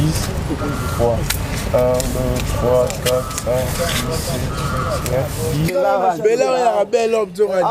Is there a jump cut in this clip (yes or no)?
yes